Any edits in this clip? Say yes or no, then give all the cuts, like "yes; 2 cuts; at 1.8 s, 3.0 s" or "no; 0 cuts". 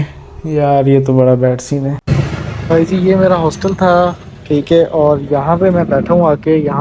no; 0 cuts